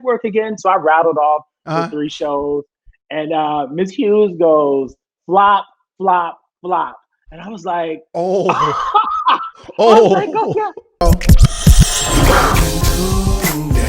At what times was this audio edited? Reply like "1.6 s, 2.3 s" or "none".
11.0 s